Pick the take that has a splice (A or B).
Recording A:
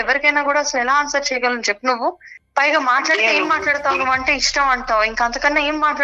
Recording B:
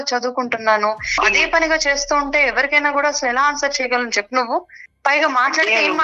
B